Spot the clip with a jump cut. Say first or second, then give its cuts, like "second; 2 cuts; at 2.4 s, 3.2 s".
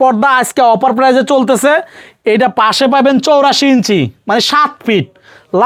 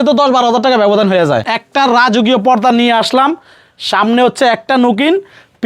second; 1 cut; at 1.4 s